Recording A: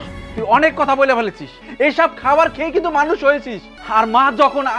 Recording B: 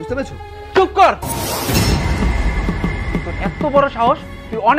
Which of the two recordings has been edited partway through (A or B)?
A